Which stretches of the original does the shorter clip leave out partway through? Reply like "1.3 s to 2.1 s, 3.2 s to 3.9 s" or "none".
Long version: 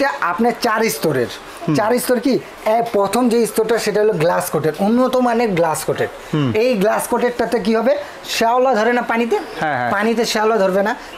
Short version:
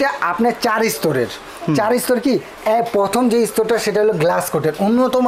none